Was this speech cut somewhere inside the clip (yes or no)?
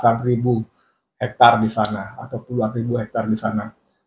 no